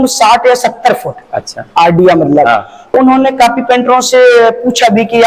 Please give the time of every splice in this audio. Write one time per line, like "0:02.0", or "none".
0:02.9